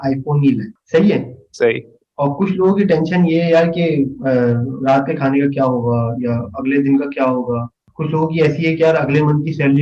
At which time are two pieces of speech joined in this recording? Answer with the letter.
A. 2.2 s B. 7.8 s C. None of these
C